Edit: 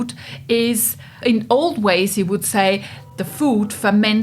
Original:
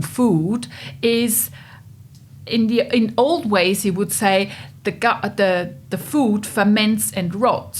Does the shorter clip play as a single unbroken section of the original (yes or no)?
no